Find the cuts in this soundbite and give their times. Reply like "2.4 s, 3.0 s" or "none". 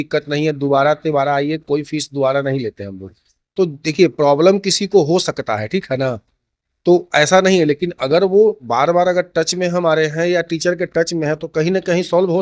none